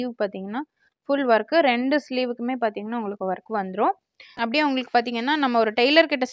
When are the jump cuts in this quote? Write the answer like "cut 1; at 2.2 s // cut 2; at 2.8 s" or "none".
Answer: cut 1; at 4.3 s